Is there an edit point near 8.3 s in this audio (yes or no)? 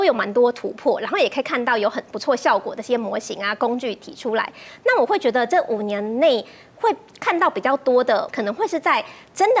yes